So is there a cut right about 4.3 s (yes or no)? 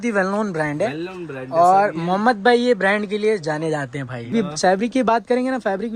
yes